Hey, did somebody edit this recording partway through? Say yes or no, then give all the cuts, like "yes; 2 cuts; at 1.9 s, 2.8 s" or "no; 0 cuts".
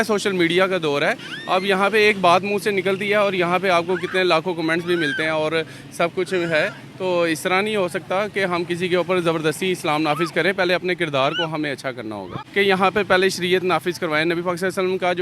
yes; 1 cut; at 12.4 s